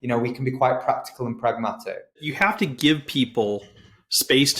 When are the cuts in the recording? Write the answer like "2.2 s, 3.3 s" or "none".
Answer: 2.3 s